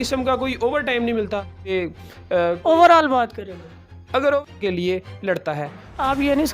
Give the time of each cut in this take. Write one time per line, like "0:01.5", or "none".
0:01.7
0:04.5